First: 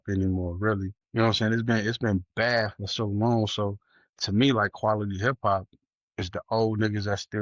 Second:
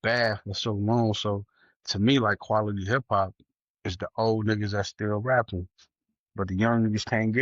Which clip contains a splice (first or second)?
first